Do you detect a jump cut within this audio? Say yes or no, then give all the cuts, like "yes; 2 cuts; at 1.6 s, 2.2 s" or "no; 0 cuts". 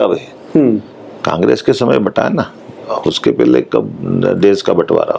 no; 0 cuts